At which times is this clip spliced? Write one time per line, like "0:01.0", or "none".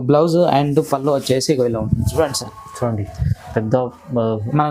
none